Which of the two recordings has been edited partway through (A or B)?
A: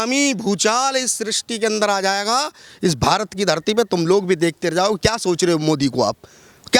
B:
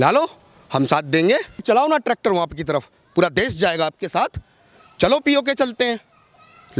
B